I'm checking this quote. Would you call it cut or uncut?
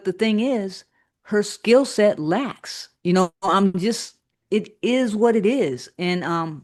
uncut